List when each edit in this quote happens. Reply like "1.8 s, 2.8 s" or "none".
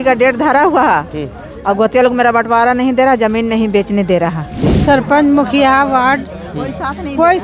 4.8 s